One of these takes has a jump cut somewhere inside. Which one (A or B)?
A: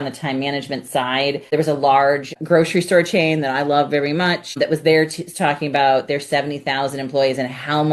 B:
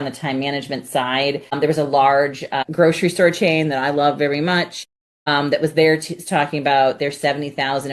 A